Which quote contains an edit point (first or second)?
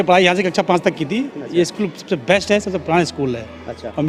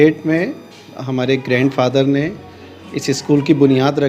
first